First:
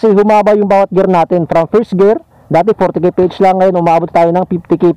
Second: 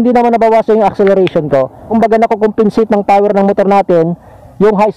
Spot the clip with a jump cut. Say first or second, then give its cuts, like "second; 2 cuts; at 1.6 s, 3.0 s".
second; 1 cut; at 1.9 s